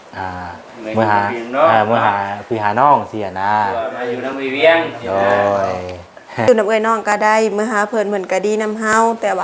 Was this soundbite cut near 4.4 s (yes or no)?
no